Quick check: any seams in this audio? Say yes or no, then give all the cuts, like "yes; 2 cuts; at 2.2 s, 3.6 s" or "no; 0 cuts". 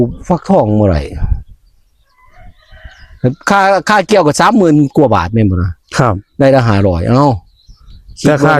no; 0 cuts